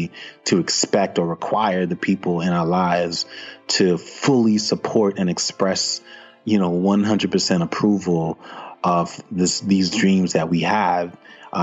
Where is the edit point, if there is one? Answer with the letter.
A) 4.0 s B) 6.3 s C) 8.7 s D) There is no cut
D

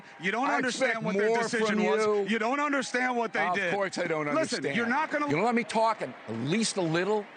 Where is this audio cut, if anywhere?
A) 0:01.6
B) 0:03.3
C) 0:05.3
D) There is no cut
C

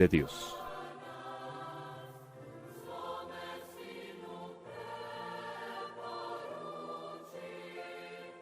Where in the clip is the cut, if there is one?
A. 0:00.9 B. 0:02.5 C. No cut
A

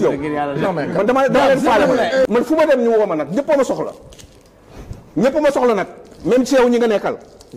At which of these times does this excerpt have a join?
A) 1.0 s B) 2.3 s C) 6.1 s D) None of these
B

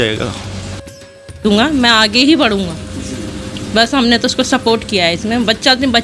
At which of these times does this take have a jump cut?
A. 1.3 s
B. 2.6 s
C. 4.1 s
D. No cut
A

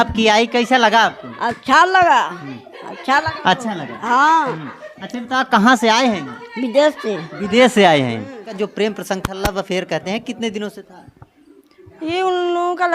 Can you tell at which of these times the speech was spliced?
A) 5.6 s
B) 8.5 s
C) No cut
B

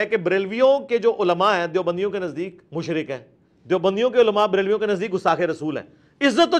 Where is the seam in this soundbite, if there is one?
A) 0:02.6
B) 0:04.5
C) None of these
A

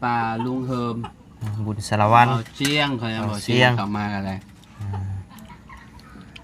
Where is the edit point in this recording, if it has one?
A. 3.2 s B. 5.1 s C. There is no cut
C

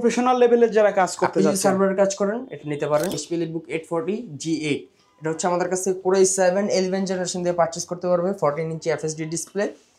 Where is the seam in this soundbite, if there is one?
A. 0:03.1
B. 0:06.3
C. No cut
A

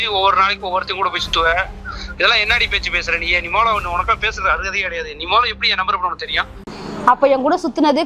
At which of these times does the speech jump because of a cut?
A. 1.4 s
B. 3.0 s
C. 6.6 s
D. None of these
C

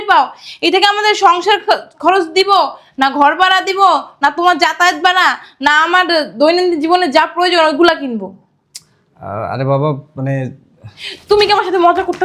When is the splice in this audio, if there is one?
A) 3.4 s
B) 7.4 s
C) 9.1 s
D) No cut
D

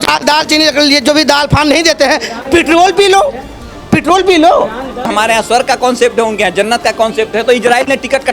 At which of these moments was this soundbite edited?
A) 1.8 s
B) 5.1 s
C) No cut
B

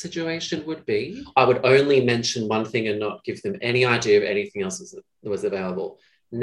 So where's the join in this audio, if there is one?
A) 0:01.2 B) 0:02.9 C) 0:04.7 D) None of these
A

